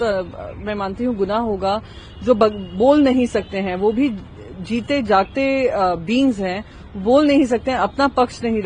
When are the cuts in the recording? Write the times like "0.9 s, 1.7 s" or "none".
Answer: none